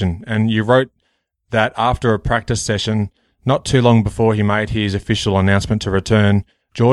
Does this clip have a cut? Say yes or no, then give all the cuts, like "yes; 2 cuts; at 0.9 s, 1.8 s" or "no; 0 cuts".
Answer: no; 0 cuts